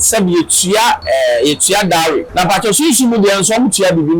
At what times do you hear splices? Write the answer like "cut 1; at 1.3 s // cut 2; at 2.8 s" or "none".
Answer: cut 1; at 1.0 s // cut 2; at 2.3 s